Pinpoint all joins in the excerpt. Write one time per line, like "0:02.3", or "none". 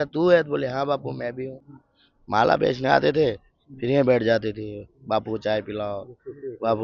0:01.6